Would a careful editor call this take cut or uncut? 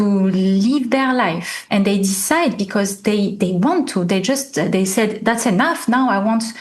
cut